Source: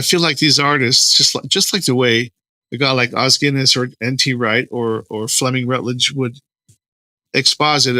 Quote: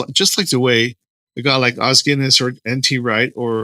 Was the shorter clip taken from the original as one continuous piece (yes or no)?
yes